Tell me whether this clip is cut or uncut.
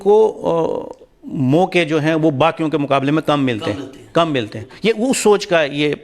uncut